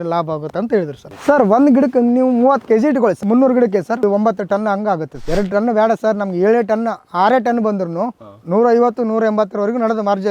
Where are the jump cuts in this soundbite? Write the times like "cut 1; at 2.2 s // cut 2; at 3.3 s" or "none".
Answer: cut 1; at 1.1 s // cut 2; at 3.2 s // cut 3; at 4.0 s // cut 4; at 5.1 s